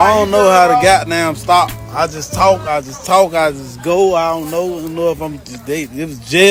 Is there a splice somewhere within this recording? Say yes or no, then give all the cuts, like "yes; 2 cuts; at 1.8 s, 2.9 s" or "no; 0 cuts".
no; 0 cuts